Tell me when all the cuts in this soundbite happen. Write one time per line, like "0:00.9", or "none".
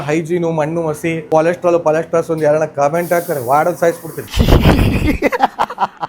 0:01.2